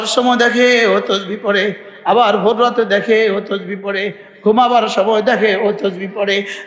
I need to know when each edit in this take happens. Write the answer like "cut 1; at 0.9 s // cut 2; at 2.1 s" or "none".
none